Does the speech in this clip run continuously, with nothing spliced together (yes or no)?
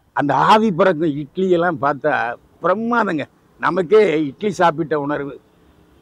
yes